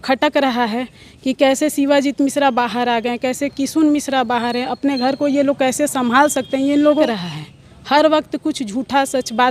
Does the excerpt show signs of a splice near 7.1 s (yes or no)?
yes